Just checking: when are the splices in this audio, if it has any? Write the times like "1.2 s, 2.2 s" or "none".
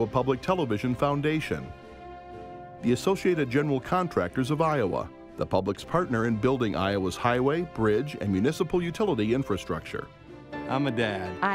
none